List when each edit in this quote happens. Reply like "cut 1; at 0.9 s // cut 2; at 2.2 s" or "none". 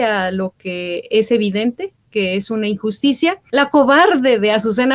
cut 1; at 3.4 s